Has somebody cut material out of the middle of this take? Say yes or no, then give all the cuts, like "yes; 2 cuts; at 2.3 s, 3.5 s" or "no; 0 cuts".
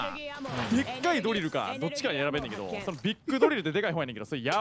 no; 0 cuts